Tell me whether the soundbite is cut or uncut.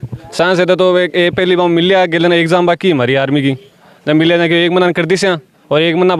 uncut